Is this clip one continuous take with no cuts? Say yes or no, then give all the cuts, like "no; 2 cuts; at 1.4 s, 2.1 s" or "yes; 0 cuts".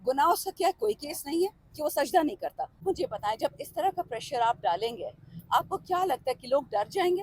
no; 1 cut; at 2.8 s